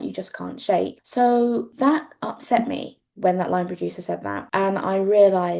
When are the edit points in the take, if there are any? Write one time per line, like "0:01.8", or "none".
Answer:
0:01.0
0:01.7
0:04.4